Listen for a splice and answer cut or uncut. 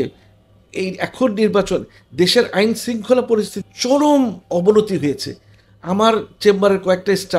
cut